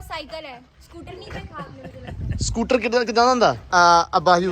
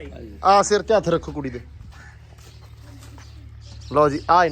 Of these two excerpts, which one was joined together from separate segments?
first; 1 cut; at 3.6 s

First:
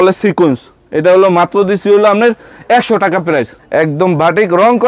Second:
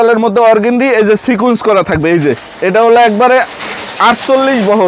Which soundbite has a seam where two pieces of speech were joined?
first; 1 cut; at 3.5 s

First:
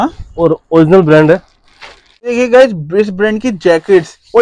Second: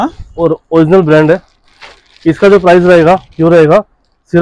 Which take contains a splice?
first; 1 cut; at 2.2 s

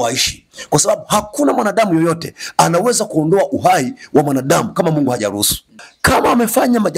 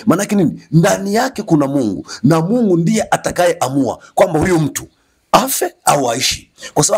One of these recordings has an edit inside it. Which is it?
first; 1 cut; at 5.8 s

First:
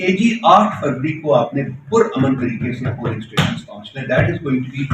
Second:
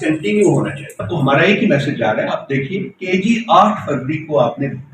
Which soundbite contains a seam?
second; 1 cut; at 1.1 s

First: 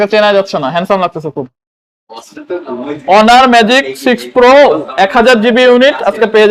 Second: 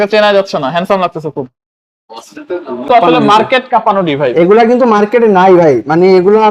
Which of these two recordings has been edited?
second; 1 cut; at 2.9 s

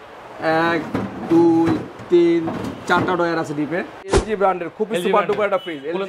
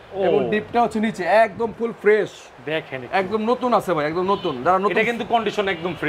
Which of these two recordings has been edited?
first; 1 cut; at 4.2 s

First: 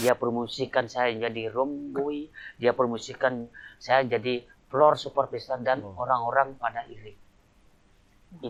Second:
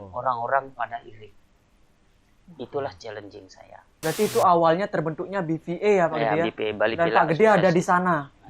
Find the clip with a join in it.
second; 1 cut; at 3.9 s

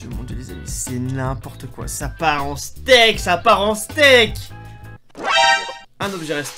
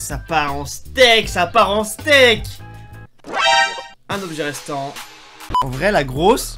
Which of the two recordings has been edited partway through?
second; 1 cut; at 5.7 s

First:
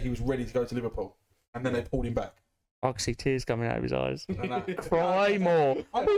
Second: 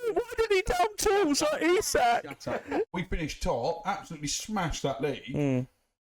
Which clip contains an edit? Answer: second; 1 cut; at 2.9 s

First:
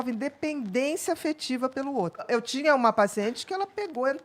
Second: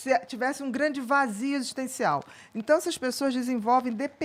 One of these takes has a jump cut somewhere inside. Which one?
first; 1 cut; at 2.3 s

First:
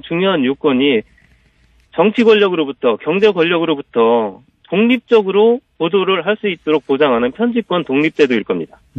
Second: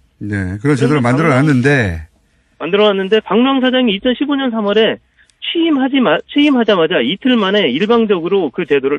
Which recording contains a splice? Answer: first; 1 cut; at 2.2 s

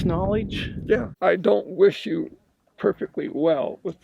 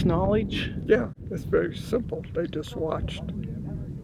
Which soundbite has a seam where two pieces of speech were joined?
first; 1 cut; at 1.1 s

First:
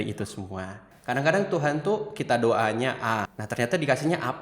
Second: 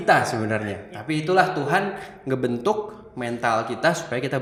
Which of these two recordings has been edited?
first; 2 cuts; at 0.9 s, 3.4 s

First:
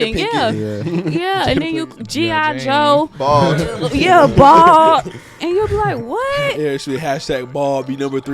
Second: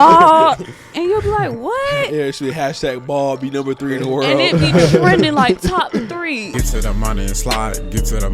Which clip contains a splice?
second; 1 cut; at 6.4 s

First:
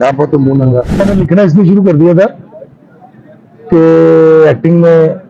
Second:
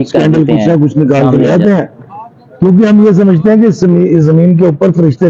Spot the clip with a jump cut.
first; 1 cut; at 1.0 s

